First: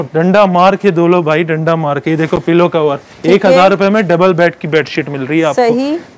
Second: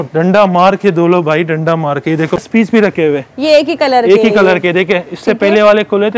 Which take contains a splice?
second; 1 cut; at 2.4 s

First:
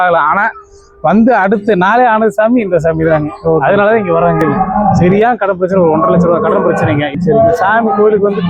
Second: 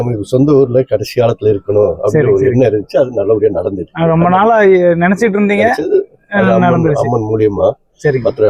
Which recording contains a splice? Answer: first; 2 cuts; at 4.5 s, 7.1 s

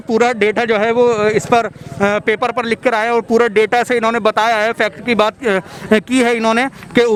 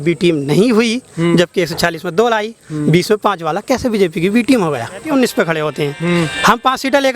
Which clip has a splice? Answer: second; 1 cut; at 5.0 s

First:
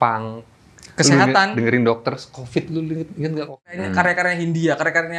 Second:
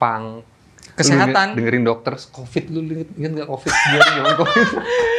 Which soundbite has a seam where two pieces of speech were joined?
first; 1 cut; at 3.7 s

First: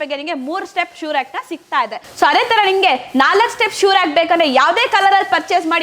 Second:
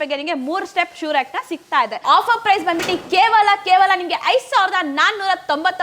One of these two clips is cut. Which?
second; 1 cut; at 2.0 s

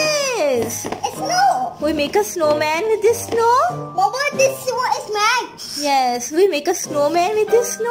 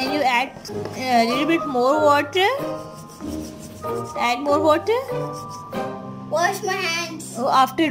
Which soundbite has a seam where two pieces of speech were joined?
second; 2 cuts; at 2.6 s, 4.2 s

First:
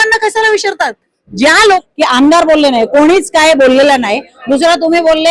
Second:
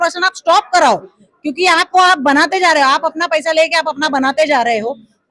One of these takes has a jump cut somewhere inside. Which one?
first; 1 cut; at 1.6 s

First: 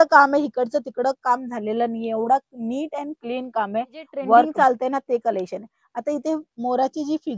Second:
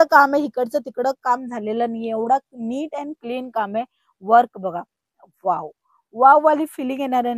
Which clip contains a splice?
first; 1 cut; at 4.5 s

